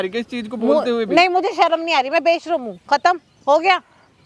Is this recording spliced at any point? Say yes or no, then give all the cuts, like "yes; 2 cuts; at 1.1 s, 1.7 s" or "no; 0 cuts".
no; 0 cuts